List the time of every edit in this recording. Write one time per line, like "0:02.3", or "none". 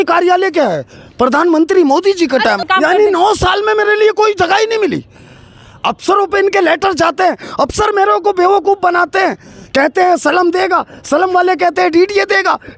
0:02.6

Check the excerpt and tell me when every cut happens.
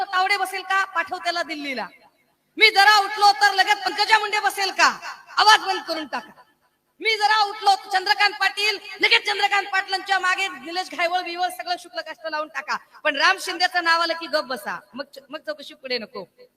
none

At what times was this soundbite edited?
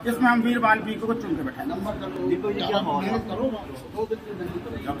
none

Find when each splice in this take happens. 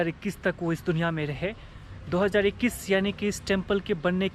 none

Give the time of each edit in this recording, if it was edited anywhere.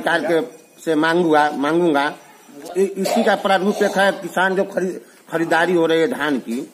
0:02.7

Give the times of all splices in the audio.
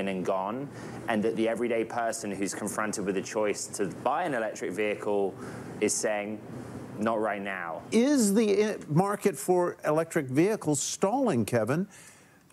0:07.7

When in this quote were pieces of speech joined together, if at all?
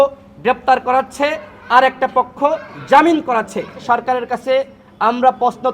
0:03.8

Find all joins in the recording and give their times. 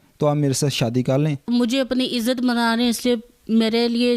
0:01.5

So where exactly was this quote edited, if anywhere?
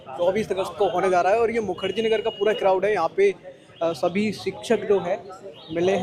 none

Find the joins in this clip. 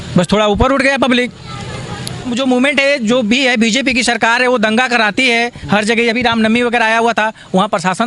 0:02.3

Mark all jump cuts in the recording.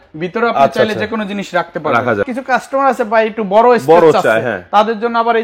0:02.2

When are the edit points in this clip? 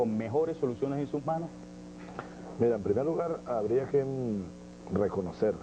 0:01.4

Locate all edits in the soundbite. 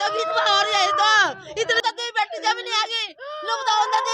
0:01.8

